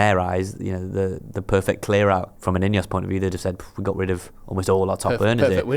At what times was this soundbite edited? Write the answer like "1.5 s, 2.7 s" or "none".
2.3 s